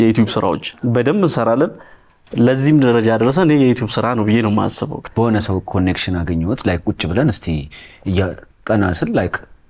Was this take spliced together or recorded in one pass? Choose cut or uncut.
cut